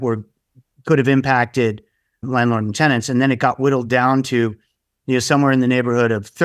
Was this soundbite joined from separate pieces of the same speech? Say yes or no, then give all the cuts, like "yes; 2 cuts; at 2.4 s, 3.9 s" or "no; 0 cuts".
yes; 1 cut; at 2.2 s